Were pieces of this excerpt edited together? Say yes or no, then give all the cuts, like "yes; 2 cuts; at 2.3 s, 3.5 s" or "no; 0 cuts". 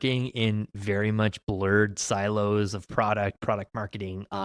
no; 0 cuts